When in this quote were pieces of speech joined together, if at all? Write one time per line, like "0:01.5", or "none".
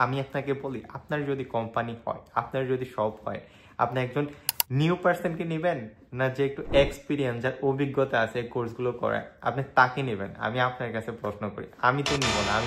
none